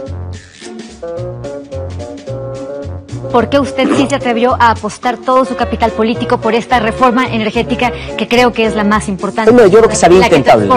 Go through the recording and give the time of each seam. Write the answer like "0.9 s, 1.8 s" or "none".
1.7 s